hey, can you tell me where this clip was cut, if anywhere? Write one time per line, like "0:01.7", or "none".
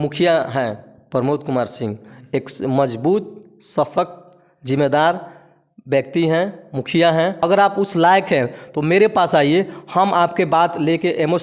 0:07.3